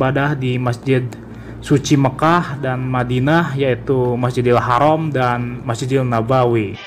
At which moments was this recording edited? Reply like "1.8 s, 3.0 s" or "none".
none